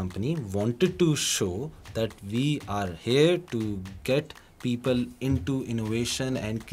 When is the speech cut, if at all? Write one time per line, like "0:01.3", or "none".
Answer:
none